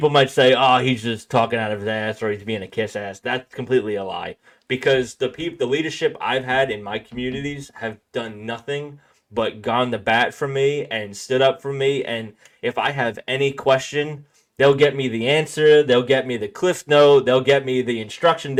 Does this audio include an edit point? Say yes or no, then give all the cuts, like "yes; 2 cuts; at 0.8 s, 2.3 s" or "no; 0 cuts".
no; 0 cuts